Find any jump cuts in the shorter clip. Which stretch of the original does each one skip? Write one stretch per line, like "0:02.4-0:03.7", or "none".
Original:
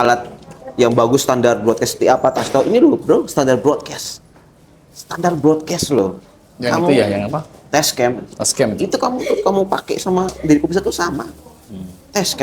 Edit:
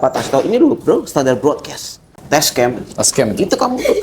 0:04.3-0:07.5

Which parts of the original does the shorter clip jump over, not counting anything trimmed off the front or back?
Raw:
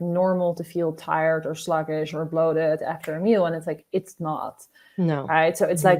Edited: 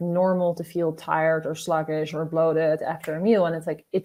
none

